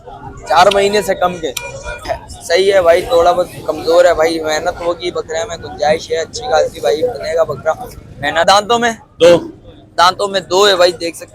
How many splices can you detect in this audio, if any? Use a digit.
2